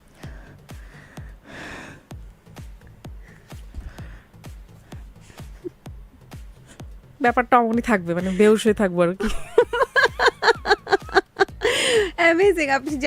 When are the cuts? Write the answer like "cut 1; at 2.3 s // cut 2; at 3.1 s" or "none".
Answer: none